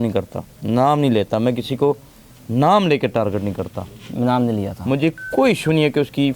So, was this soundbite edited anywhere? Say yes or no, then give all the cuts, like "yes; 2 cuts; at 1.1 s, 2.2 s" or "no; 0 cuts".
no; 0 cuts